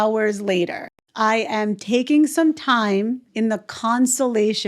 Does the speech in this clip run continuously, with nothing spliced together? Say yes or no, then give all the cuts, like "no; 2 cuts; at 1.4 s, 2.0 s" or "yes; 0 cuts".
no; 2 cuts; at 1.0 s, 3.2 s